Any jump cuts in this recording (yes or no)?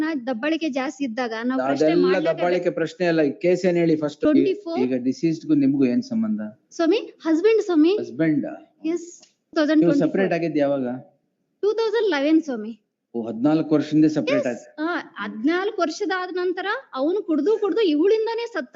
yes